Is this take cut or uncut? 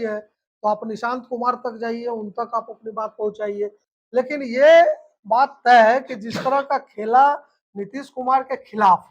cut